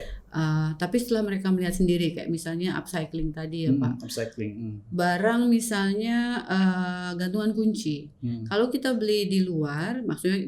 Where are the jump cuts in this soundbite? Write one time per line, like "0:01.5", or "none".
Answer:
none